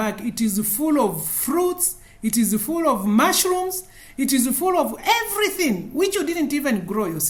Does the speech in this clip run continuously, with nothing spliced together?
yes; 0 cuts

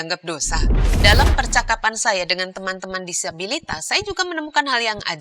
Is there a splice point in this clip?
yes; 1 cut; at 0.9 s

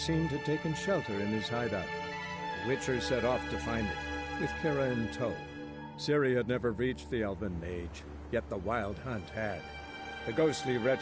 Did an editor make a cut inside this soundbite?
no; 0 cuts

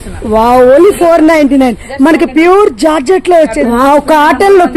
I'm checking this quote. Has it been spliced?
yes; 1 cut; at 3.6 s

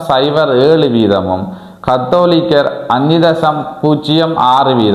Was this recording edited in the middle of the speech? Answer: no; 0 cuts

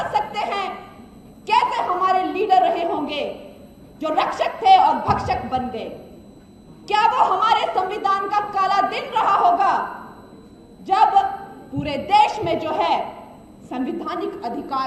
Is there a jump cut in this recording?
no; 0 cuts

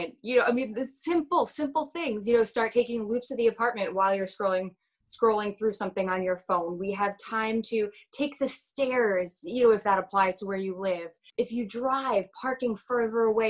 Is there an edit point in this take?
yes; 1 cut; at 11.2 s

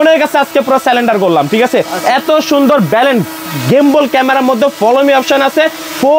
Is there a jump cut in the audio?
no; 0 cuts

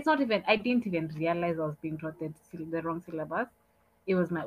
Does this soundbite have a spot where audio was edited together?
no; 0 cuts

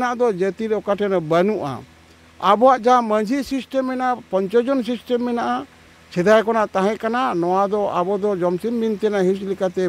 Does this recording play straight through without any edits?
yes; 0 cuts

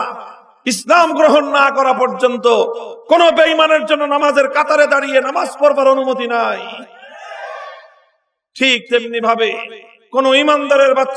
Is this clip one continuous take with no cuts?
yes; 0 cuts

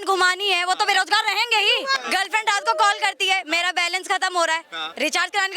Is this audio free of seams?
no; 1 cut; at 2.0 s

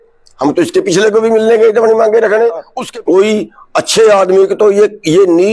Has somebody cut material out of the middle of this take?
yes; 1 cut; at 2.8 s

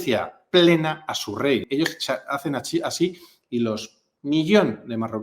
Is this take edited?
yes; 1 cut; at 1.7 s

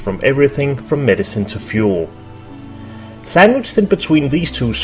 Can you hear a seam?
yes; 1 cut; at 3.9 s

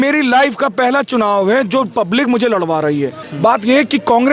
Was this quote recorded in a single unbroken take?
no; 1 cut; at 3.3 s

